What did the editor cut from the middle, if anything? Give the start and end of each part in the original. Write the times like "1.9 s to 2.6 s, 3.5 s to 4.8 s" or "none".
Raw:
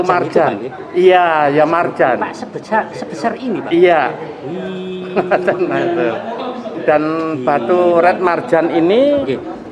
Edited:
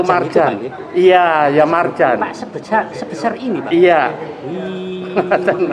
none